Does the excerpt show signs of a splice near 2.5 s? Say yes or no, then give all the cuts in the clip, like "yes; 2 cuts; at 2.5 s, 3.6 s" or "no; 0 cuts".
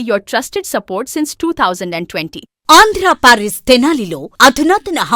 no; 0 cuts